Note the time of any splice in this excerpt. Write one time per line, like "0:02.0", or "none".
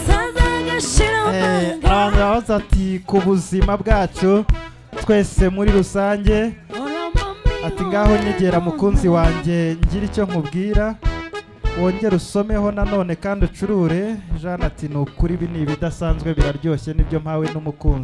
none